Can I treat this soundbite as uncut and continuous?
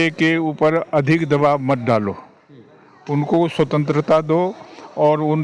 yes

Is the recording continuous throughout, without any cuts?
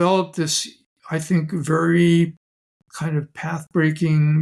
yes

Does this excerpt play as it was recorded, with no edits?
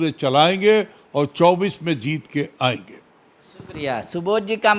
yes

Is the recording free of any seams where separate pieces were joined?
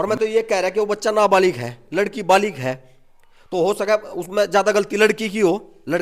yes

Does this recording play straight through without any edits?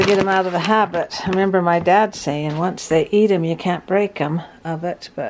yes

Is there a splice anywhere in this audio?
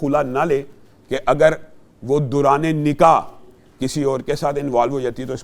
no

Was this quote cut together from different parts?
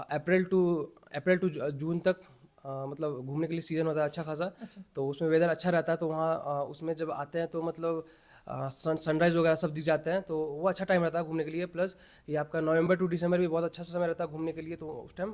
no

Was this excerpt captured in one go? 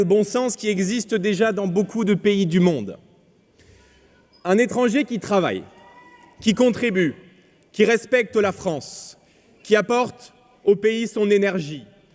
yes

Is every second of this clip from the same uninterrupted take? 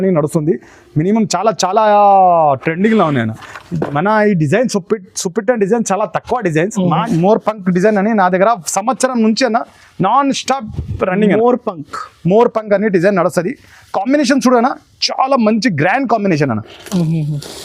no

